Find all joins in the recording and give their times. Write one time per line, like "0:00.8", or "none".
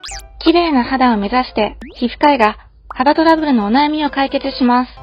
none

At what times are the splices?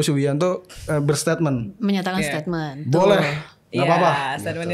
none

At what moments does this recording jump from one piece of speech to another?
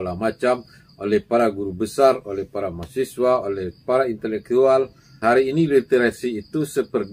0:05.1

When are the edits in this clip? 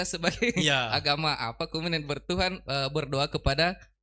none

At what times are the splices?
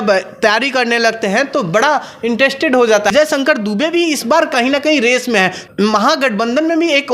0:03.1
0:05.6

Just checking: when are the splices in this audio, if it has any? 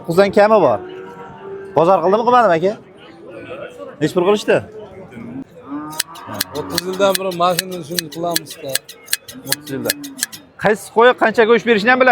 0:05.3

